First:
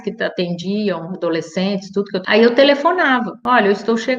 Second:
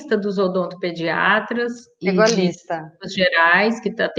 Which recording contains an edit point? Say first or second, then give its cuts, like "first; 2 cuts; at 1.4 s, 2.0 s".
first; 2 cuts; at 2.2 s, 3.3 s